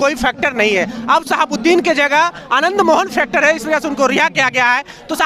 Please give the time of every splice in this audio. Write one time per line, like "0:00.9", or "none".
none